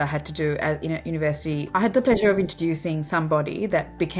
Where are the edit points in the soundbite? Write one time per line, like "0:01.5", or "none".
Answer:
0:01.6